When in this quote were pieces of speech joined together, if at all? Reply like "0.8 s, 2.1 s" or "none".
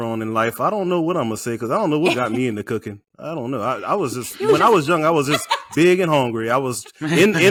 none